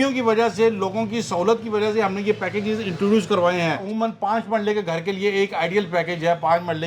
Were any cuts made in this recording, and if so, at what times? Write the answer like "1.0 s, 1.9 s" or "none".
3.8 s